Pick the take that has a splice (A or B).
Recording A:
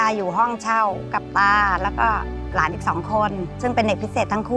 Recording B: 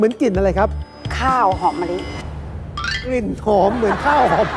A